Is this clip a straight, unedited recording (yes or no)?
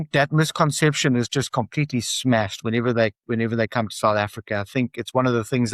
yes